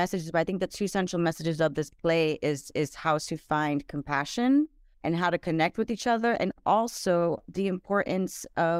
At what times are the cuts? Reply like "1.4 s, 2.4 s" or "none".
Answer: 4.9 s

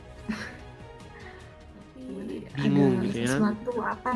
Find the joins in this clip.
2.1 s

